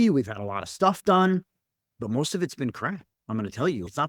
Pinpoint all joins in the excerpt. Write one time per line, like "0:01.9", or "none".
none